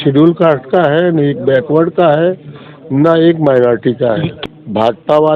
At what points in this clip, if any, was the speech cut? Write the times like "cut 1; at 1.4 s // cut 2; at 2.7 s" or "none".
cut 1; at 4.3 s